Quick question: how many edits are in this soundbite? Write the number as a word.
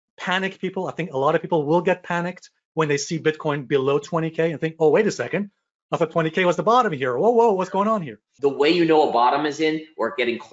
one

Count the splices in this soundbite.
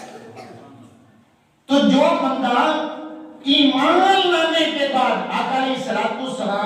zero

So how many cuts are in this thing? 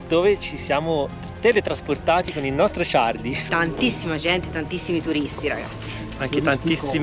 one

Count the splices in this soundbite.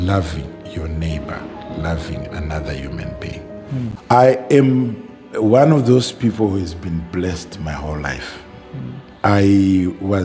one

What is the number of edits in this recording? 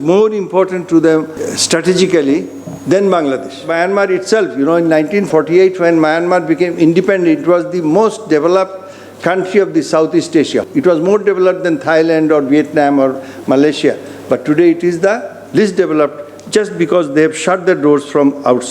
four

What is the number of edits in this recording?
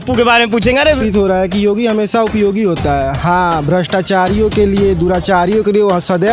one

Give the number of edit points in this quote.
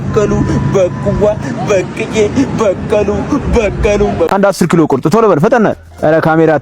zero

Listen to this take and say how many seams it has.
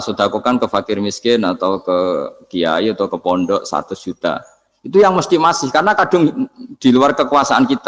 zero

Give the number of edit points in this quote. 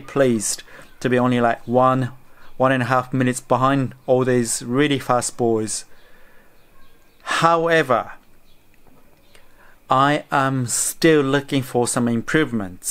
zero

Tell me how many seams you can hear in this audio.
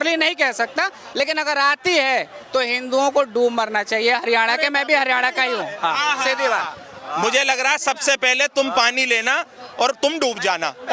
one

